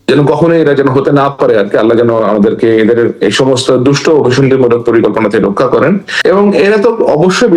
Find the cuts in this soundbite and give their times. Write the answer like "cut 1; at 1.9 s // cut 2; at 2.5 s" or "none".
none